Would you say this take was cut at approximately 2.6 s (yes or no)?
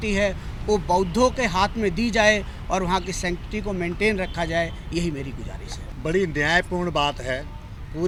no